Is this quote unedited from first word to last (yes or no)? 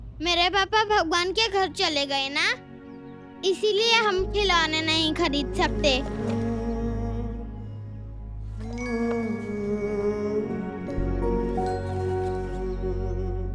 no